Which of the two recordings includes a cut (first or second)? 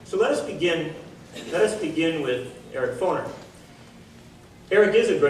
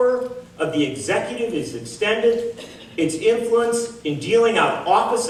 first